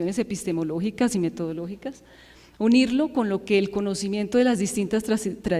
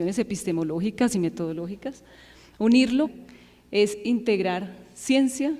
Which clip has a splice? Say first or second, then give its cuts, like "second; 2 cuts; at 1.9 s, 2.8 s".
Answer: first; 1 cut; at 3.1 s